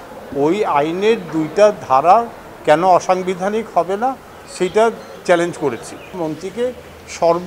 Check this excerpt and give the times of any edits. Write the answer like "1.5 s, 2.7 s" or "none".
6.2 s